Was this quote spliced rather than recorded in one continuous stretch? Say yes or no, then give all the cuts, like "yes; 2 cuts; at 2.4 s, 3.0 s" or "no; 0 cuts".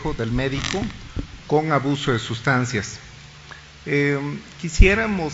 yes; 1 cut; at 3.3 s